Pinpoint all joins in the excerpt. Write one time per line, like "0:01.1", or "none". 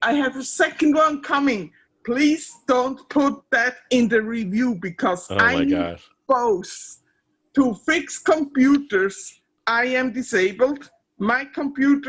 none